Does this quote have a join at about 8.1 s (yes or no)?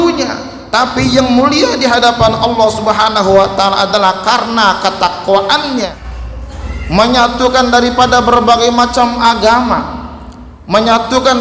no